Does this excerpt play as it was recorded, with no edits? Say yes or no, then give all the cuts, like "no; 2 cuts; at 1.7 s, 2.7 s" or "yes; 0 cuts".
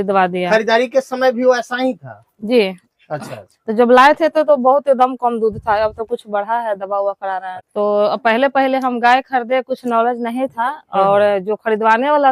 yes; 0 cuts